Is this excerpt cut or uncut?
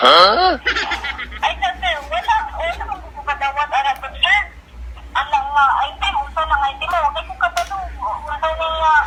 uncut